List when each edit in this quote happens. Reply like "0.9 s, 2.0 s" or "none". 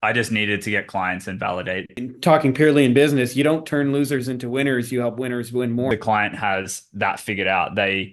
1.9 s, 5.9 s